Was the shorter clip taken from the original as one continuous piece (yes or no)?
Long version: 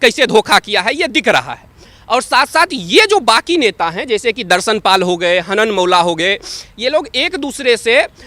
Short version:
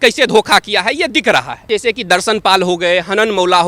no